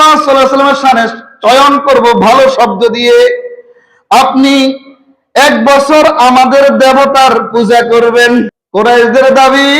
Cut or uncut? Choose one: cut